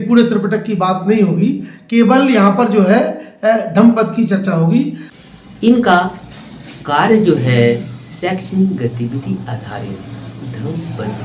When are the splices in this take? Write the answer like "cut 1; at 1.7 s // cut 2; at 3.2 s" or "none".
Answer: cut 1; at 5.0 s